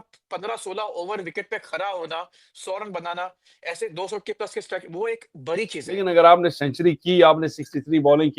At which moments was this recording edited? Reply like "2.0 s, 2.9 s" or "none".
6.1 s